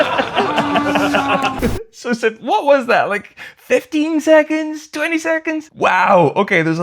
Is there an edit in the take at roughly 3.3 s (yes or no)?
no